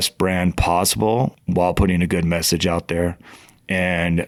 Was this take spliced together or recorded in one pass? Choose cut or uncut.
uncut